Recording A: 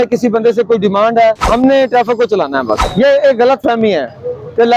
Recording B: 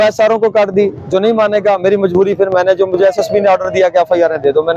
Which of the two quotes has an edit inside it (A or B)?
A